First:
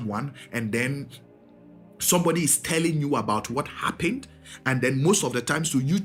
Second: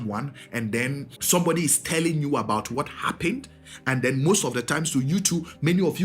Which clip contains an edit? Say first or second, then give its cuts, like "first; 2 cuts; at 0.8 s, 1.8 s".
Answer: second; 1 cut; at 1.1 s